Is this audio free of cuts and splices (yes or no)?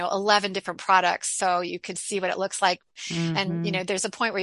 no